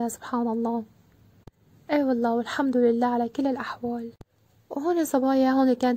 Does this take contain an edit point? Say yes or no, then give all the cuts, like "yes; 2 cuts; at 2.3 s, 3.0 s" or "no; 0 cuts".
no; 0 cuts